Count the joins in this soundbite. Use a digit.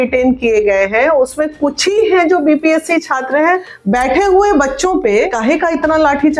2